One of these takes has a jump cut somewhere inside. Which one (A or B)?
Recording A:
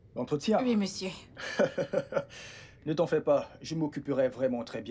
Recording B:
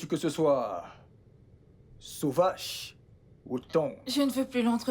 B